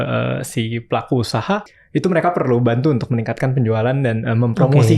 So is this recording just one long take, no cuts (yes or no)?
no